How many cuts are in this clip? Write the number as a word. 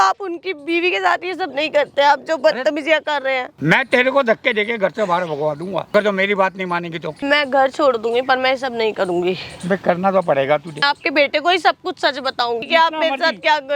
five